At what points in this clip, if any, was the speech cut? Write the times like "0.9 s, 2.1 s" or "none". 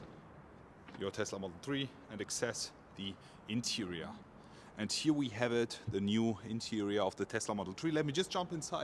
none